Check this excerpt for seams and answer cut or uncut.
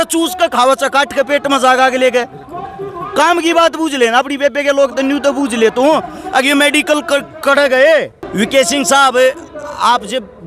cut